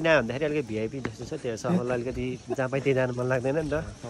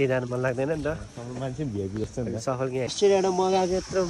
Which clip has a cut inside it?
second; 1 cut; at 2.5 s

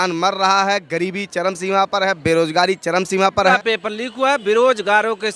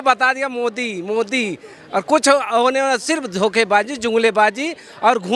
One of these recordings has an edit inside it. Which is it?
first; 1 cut; at 3.5 s

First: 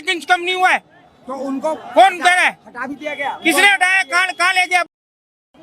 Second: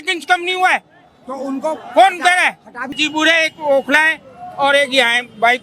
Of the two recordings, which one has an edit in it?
second; 1 cut; at 3.0 s

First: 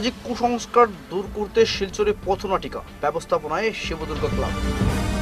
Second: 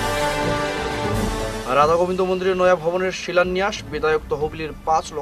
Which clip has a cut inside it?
second; 1 cut; at 1.3 s

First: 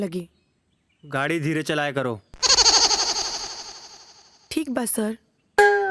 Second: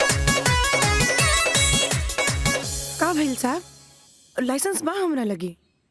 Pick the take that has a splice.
second; 1 cut; at 1.1 s

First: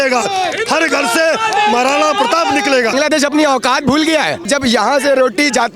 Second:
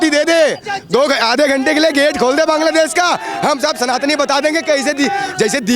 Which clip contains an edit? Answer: first; 2 cuts; at 2.9 s, 4.4 s

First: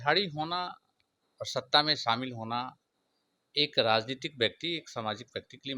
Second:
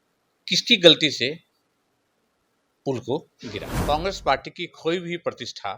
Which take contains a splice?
second; 1 cut; at 3.7 s

